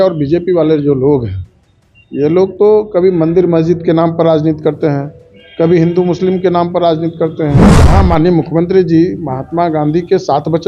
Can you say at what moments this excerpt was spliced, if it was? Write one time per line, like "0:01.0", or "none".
0:07.7